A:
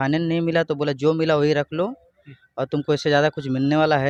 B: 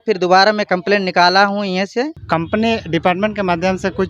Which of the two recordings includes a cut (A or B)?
B